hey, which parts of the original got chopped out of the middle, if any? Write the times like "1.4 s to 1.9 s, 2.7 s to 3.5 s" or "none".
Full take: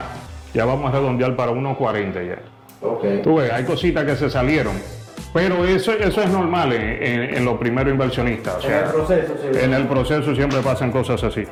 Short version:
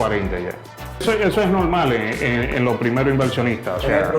2.8 s to 5.8 s